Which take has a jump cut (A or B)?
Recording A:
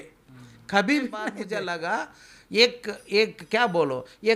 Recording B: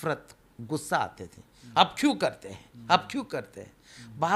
A